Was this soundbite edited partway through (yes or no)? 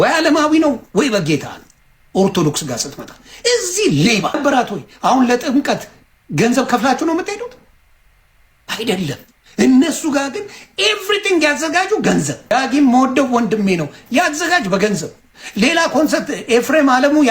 yes